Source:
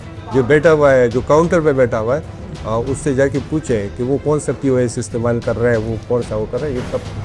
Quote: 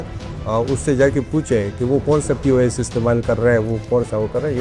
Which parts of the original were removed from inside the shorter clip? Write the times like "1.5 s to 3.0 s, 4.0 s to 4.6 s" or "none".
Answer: none